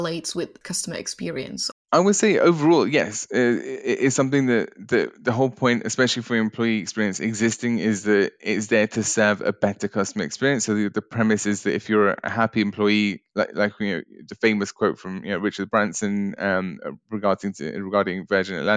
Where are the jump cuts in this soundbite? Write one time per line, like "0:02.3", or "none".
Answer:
0:01.7

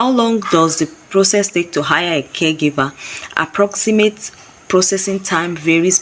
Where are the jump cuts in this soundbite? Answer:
none

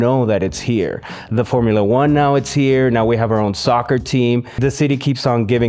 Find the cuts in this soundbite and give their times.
0:04.6

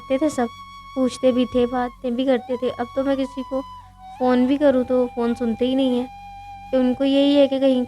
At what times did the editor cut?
none

